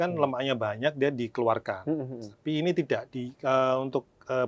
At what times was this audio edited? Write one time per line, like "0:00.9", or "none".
none